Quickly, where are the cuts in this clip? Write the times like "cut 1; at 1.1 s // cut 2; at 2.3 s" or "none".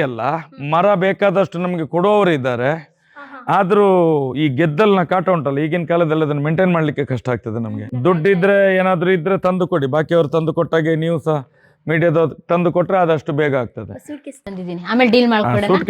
cut 1; at 8.0 s